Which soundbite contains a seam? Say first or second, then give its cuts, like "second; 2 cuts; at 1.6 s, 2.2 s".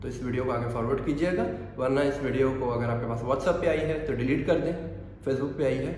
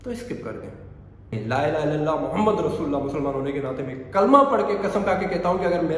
second; 1 cut; at 1.3 s